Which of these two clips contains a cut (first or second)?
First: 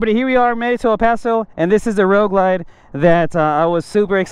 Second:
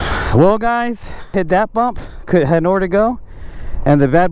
second